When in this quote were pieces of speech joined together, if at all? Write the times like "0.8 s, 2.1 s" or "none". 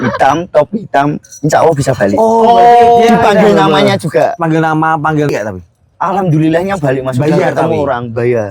5.3 s